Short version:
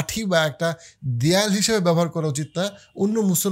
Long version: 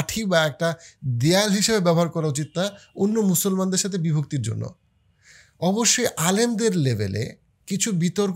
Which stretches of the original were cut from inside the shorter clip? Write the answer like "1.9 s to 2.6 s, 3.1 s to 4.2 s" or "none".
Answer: none